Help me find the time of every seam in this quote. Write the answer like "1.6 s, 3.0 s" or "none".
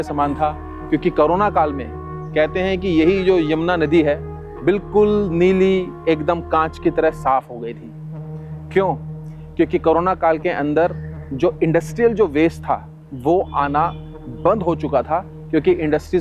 none